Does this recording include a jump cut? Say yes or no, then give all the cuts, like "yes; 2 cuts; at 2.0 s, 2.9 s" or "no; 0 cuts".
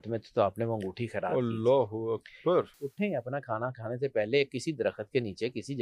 yes; 1 cut; at 2.7 s